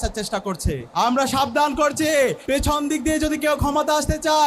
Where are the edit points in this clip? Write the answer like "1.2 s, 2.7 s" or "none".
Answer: 0.8 s, 2.4 s